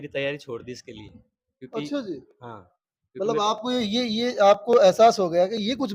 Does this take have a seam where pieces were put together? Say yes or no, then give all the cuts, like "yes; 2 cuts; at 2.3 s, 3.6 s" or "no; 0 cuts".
no; 0 cuts